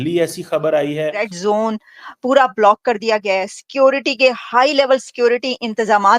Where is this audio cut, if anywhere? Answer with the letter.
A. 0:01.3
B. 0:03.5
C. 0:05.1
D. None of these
A